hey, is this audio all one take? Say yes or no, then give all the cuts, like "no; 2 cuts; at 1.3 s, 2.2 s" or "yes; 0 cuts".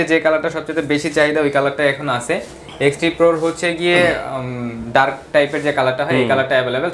yes; 0 cuts